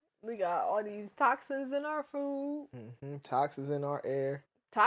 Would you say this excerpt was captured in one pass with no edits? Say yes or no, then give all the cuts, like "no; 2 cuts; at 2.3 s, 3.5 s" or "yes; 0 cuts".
yes; 0 cuts